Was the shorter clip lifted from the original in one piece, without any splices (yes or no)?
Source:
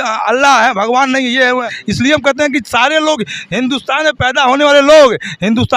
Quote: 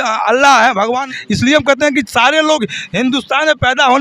no